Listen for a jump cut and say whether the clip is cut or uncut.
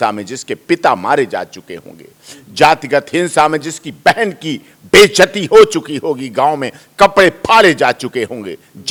uncut